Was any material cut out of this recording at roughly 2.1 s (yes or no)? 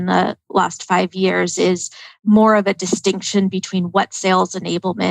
yes